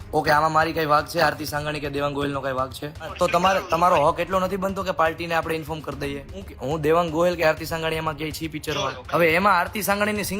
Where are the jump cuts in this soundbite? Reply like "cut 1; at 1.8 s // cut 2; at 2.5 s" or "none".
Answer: cut 1; at 3.1 s // cut 2; at 6.5 s // cut 3; at 9.0 s